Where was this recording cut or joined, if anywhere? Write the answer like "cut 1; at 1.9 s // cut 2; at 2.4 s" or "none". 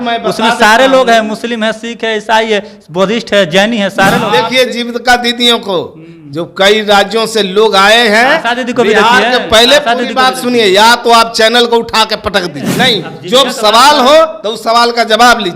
cut 1; at 4.4 s // cut 2; at 12.7 s